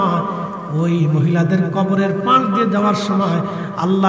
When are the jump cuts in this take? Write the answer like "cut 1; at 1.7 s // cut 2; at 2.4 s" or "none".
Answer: none